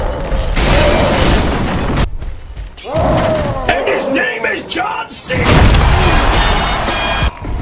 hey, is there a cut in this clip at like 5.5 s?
no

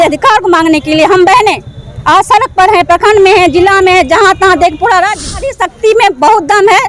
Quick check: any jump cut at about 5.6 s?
yes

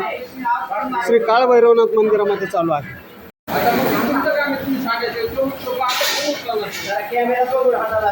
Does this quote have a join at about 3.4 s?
yes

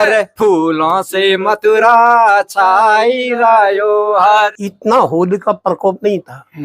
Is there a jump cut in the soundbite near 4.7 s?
yes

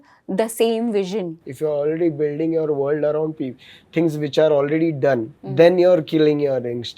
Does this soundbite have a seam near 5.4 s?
yes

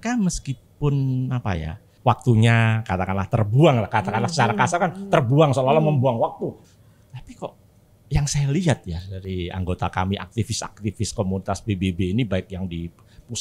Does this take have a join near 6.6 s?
yes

